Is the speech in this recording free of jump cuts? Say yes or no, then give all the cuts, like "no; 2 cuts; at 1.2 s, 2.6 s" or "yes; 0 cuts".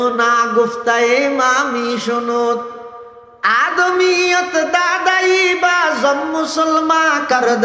yes; 0 cuts